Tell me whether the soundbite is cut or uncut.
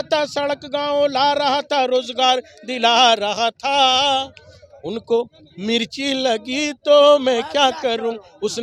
uncut